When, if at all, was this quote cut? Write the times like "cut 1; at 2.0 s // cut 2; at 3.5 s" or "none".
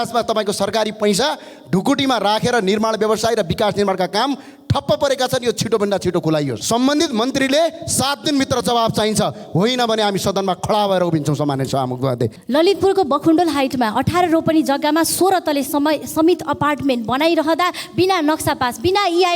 cut 1; at 6.6 s // cut 2; at 12.3 s